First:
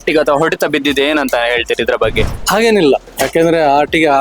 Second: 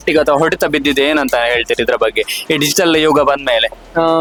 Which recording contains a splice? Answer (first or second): first